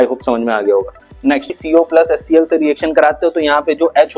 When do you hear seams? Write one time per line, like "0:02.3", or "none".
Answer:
0:01.6